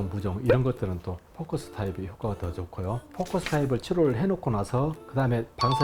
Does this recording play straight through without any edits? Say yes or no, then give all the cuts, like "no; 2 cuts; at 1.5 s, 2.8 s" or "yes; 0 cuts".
no; 1 cut; at 3.1 s